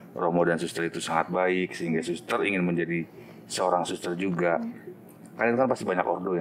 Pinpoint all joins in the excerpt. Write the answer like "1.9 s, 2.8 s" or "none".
none